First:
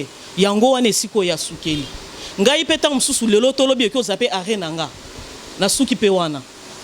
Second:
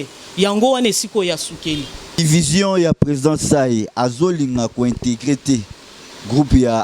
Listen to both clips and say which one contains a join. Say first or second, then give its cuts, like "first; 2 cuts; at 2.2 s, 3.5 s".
second; 1 cut; at 2.2 s